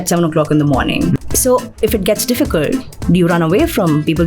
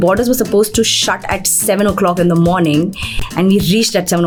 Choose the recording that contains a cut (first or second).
first